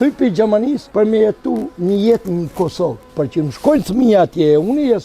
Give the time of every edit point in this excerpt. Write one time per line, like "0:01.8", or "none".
0:00.8
0:01.7
0:03.1